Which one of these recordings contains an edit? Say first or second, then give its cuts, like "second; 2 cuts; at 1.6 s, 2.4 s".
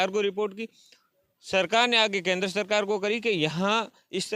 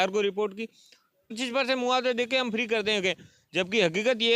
second; 1 cut; at 1.4 s